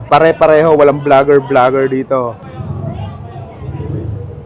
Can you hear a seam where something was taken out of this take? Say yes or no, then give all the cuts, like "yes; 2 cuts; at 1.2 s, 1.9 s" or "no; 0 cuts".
yes; 1 cut; at 2.4 s